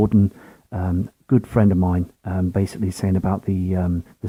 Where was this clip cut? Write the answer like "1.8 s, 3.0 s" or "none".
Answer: none